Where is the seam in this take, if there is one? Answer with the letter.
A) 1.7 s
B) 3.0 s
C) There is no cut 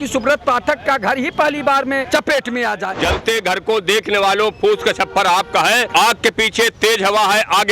B